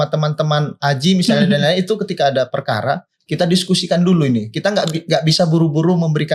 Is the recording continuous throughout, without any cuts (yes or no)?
yes